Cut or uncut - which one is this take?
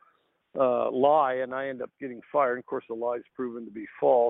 uncut